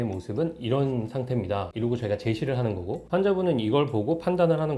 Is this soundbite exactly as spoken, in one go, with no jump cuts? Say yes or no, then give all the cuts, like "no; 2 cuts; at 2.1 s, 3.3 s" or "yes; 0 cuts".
no; 1 cut; at 1.7 s